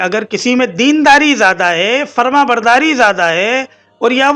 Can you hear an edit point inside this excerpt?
no; 0 cuts

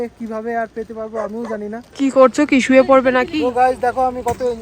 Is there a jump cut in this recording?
yes; 1 cut; at 1.8 s

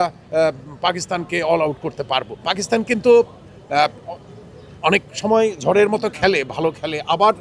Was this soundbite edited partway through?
yes; 1 cut; at 2.5 s

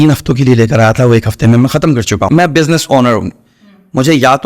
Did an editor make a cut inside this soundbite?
yes; 1 cut; at 2.4 s

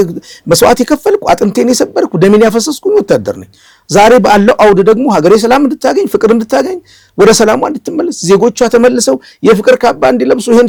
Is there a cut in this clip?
no; 0 cuts

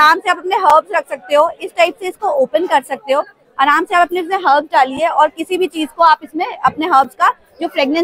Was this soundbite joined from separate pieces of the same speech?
no; 0 cuts

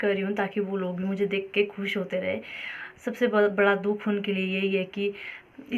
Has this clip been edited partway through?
no; 0 cuts

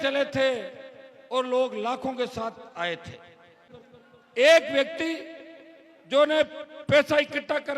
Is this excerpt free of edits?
no; 1 cut; at 3.6 s

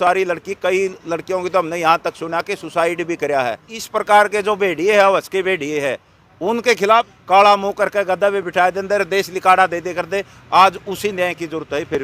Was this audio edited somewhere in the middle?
yes; 2 cuts; at 3.8 s, 7.2 s

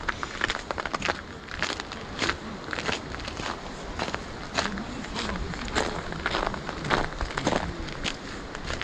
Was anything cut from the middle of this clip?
no; 0 cuts

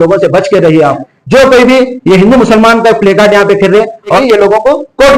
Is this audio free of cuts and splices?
no; 2 cuts; at 1.1 s, 4.2 s

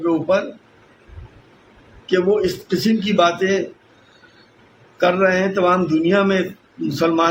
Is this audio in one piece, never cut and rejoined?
yes; 0 cuts

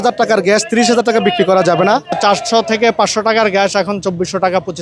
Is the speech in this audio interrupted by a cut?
yes; 1 cut; at 2.1 s

